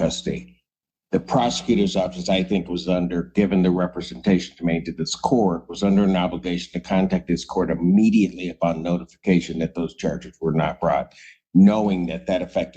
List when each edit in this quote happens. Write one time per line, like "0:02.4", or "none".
none